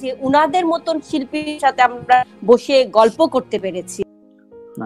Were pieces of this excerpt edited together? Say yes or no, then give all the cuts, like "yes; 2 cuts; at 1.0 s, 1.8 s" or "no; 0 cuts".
no; 0 cuts